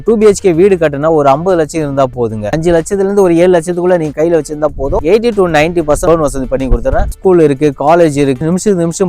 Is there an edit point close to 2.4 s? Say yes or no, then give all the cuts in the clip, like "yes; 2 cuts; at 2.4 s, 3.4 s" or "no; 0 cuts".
yes; 3 cuts; at 2.4 s, 5.0 s, 7.1 s